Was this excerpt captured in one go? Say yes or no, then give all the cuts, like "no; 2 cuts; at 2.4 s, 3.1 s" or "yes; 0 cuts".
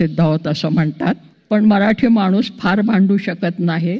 no; 1 cut; at 1.3 s